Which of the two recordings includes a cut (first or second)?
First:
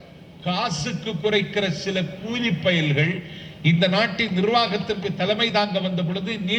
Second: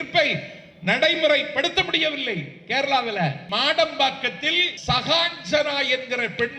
second